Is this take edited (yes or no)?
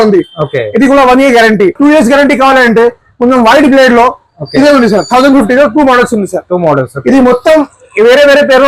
yes